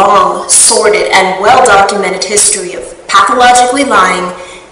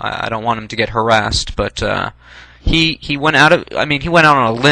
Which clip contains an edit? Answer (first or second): second